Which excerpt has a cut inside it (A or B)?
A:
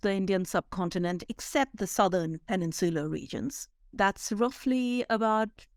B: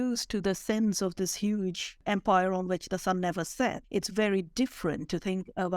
B